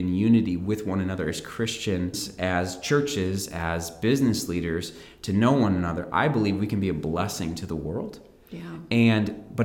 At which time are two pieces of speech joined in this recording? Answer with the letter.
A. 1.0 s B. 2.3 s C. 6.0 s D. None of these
B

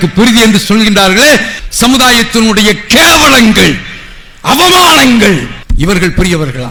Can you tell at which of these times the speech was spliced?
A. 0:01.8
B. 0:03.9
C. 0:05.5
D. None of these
D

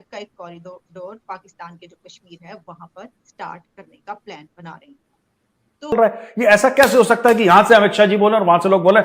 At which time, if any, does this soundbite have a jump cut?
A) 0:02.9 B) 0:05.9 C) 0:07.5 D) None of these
B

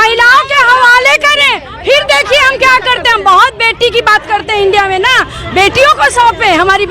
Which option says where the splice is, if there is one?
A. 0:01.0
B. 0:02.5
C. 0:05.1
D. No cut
D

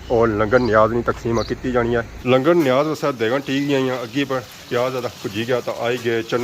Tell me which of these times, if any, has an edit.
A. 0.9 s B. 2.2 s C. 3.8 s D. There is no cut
B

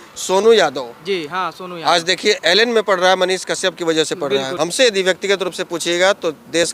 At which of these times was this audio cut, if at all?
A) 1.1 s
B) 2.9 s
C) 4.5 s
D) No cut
C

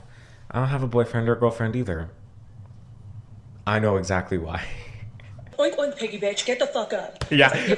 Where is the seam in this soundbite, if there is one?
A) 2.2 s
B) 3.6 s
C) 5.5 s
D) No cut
C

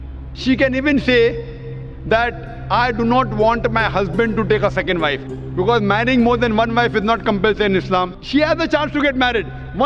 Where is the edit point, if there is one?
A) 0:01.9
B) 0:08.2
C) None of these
B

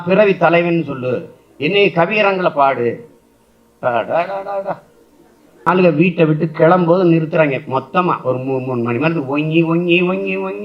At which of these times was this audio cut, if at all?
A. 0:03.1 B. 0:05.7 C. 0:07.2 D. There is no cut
B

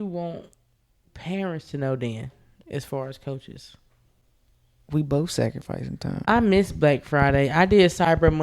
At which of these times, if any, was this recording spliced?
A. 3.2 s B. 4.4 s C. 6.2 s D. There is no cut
C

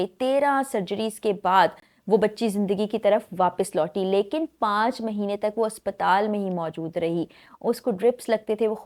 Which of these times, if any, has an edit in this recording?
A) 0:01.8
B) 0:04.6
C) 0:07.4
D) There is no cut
D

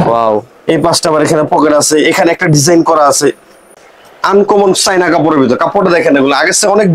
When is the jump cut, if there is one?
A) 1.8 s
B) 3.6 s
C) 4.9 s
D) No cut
B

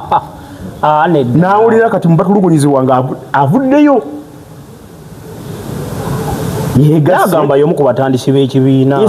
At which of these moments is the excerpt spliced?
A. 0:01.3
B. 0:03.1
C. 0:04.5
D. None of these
D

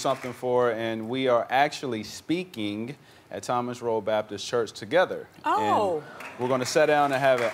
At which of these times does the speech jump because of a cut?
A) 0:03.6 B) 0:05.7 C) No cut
B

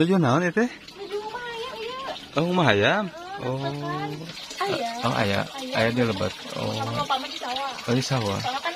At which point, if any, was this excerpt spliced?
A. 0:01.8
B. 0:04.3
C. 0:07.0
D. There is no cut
B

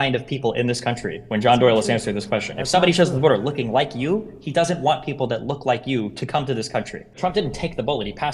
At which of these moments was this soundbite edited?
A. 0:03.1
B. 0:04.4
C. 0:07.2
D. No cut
C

